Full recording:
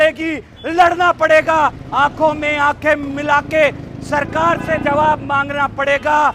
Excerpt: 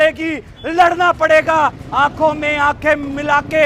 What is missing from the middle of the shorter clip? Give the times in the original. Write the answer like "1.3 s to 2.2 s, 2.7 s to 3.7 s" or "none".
none